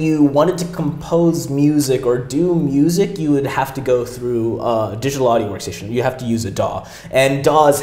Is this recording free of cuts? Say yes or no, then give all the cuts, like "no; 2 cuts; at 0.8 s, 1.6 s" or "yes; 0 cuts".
yes; 0 cuts